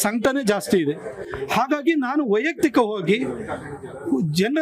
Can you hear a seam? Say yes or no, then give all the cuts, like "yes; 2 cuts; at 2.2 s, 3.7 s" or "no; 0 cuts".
no; 0 cuts